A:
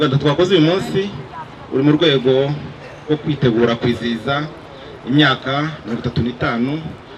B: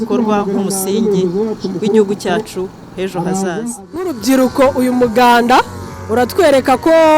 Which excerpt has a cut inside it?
B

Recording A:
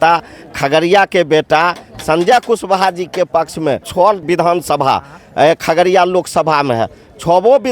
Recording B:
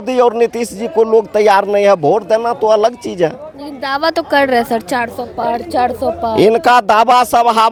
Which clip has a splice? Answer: A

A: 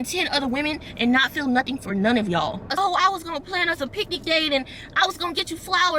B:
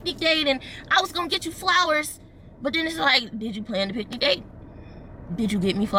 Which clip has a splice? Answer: A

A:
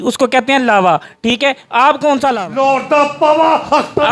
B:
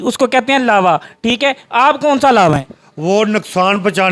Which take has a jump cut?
A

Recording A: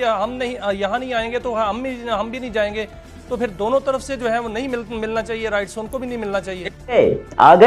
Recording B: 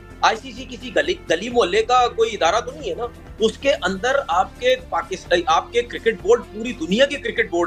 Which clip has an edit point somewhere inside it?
A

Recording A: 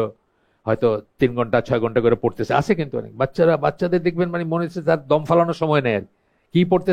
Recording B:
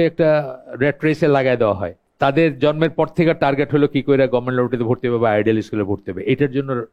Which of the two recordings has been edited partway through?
B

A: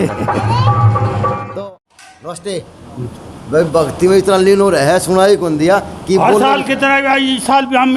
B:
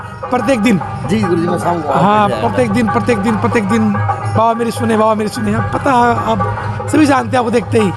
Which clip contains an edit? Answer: A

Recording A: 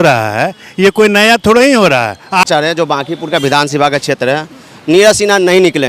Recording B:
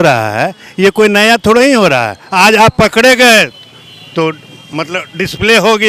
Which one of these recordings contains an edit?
A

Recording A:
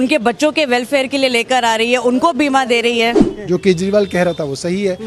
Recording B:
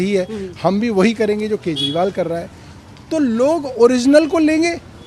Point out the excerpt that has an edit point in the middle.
A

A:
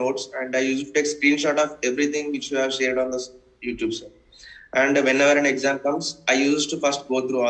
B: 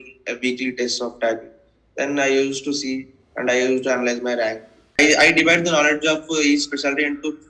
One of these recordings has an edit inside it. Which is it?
B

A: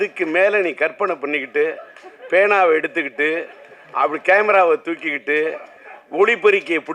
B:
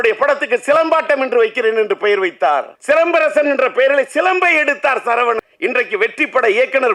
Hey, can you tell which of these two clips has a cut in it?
B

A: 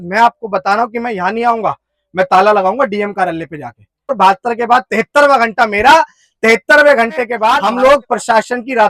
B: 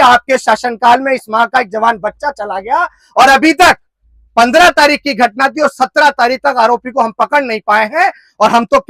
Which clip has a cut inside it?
A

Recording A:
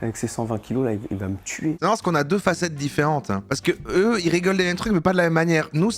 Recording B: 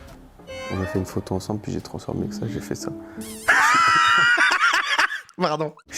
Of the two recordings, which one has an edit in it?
A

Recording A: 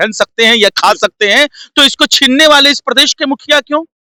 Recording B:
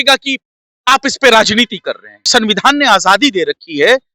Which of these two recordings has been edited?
B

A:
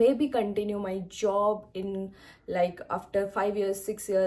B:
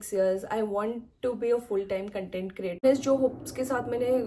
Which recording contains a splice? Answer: B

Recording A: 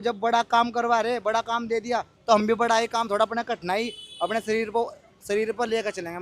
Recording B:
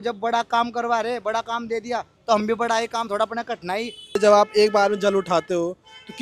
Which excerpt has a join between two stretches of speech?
B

